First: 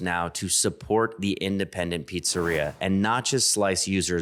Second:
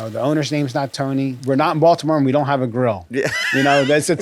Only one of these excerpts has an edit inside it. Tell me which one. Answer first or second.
second